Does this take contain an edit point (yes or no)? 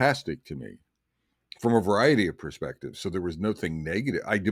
no